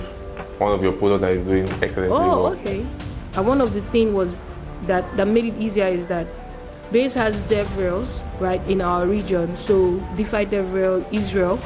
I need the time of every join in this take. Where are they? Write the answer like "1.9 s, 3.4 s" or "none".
3.2 s